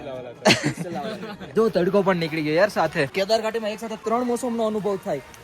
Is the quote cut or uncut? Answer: cut